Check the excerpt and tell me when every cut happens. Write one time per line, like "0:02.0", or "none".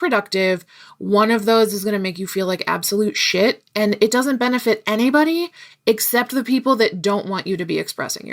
none